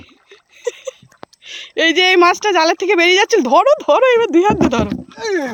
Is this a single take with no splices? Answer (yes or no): yes